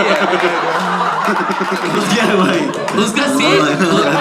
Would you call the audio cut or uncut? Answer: cut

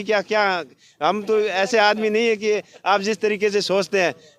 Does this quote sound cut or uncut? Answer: uncut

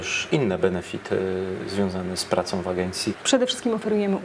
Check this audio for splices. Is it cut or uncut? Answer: cut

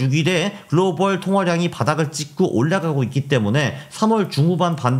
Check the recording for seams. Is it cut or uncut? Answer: uncut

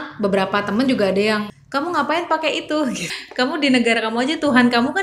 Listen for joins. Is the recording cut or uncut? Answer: cut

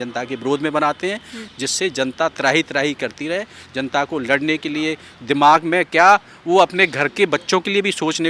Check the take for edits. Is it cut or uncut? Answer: uncut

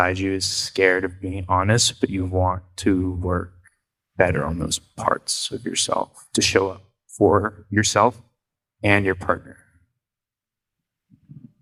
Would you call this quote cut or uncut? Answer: uncut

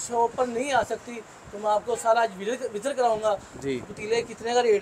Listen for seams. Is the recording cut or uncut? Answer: uncut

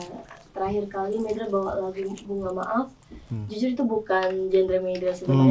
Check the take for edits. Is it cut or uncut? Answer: uncut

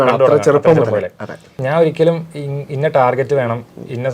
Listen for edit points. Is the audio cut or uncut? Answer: cut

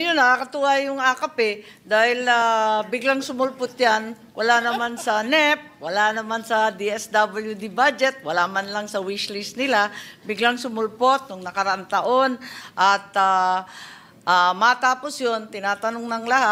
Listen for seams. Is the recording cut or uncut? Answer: uncut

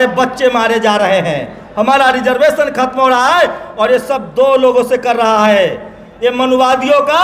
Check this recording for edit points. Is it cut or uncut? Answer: uncut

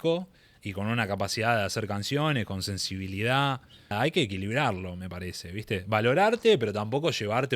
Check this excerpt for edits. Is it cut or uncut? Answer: cut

